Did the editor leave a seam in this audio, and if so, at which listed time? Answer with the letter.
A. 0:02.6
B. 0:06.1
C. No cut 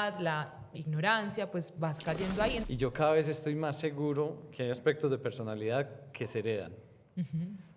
A